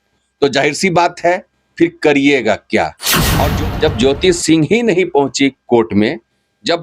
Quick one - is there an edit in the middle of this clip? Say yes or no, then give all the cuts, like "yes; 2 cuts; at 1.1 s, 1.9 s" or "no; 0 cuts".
yes; 1 cut; at 3.5 s